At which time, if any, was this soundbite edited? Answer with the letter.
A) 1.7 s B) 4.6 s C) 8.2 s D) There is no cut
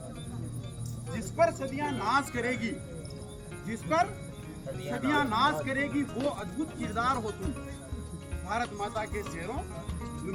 D